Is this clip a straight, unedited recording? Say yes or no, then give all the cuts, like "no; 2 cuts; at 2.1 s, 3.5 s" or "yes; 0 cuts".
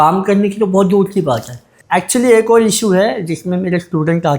no; 1 cut; at 1.5 s